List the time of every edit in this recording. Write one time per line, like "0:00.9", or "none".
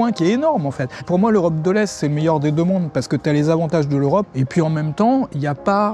0:01.0
0:04.3